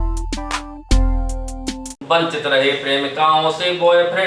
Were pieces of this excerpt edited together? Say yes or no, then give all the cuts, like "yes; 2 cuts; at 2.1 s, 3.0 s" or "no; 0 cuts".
yes; 1 cut; at 1.9 s